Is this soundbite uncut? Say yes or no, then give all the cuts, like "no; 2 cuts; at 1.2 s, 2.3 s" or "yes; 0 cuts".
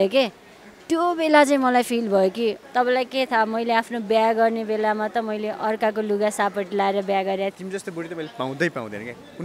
no; 2 cuts; at 2.6 s, 7.5 s